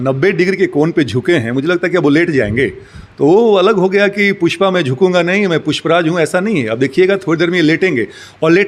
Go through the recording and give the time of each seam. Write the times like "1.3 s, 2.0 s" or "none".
none